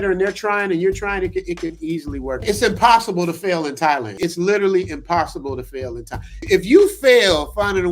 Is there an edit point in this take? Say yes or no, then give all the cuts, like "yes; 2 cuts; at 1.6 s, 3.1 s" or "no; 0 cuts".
yes; 3 cuts; at 2.4 s, 4.2 s, 6.5 s